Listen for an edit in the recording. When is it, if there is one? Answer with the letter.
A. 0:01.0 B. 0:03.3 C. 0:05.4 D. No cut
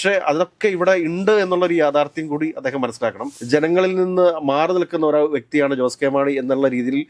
B